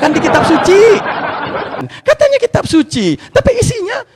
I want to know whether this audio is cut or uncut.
cut